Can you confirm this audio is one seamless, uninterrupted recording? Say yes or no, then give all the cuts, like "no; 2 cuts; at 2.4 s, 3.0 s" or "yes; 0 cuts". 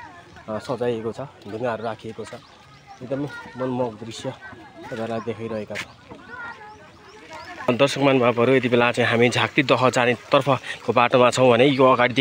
yes; 0 cuts